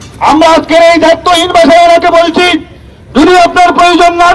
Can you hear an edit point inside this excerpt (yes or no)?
no